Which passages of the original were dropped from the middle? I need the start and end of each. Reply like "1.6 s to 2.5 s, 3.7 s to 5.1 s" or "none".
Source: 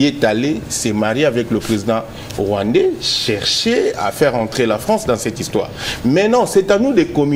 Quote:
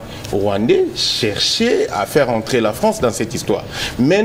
none